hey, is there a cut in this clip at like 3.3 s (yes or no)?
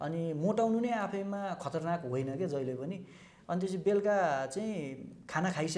yes